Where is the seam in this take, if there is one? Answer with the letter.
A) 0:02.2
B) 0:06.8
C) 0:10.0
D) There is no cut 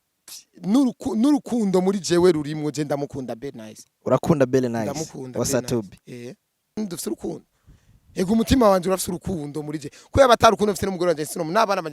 B